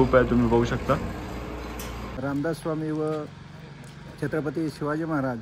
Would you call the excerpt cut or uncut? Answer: cut